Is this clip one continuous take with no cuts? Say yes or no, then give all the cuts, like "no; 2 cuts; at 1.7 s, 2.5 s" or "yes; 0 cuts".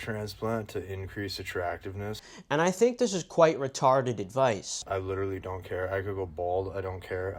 no; 2 cuts; at 2.3 s, 4.7 s